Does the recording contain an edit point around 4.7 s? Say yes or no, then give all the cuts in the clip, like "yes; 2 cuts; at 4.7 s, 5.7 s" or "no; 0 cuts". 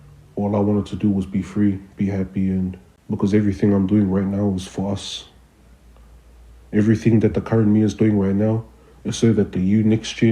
no; 1 cut; at 2.9 s